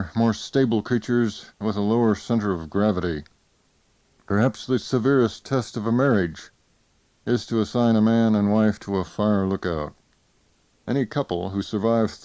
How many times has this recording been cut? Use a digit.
0